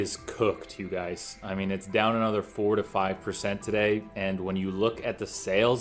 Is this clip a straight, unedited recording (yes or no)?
yes